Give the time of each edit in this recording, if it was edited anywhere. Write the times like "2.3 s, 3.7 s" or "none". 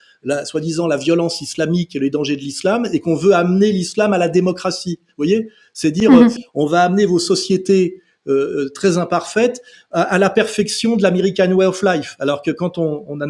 none